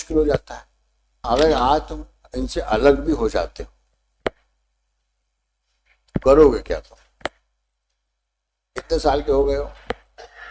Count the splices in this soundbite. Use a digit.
1